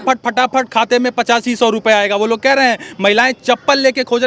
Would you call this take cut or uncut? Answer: uncut